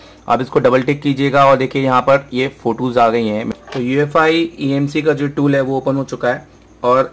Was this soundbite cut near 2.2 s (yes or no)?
no